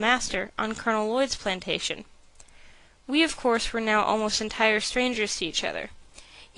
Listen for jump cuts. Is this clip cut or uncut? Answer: cut